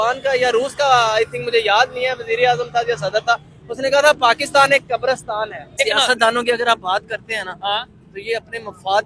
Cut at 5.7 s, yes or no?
yes